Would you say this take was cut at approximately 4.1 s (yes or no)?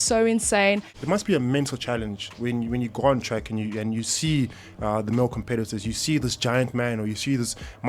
no